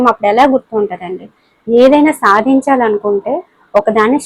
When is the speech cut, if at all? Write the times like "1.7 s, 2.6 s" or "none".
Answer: none